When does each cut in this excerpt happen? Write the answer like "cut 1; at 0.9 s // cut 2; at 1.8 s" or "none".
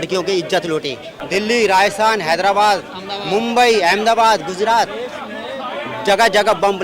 cut 1; at 1.3 s